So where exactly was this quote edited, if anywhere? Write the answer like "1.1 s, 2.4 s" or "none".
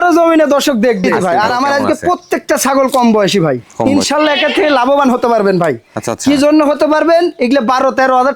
1.1 s, 3.7 s